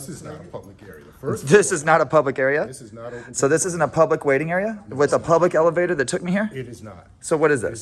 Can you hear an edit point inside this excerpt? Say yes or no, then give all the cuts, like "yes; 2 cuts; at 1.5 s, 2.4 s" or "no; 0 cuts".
no; 0 cuts